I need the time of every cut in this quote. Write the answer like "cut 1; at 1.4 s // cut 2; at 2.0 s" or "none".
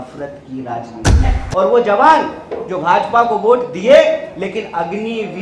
cut 1; at 1.4 s